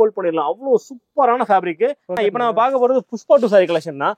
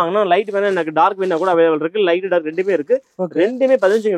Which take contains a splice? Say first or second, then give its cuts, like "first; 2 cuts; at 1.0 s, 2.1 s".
first; 1 cut; at 2.2 s